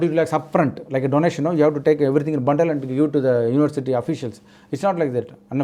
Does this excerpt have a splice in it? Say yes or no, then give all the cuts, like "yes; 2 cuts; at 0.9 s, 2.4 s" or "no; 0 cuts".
no; 0 cuts